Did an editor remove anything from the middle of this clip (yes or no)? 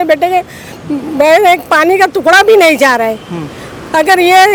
no